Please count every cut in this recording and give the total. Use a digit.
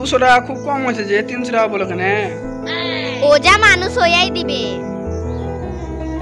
0